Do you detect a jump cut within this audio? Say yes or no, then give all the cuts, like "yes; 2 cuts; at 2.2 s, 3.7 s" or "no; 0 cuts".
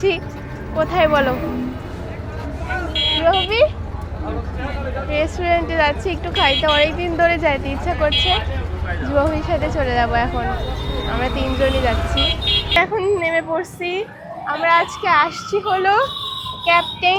no; 0 cuts